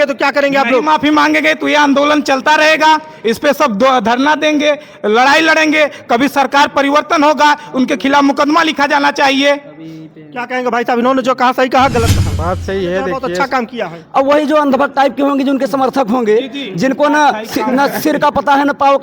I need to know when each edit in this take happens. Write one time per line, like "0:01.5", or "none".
0:13.3